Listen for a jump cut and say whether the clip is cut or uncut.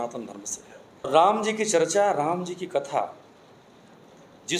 cut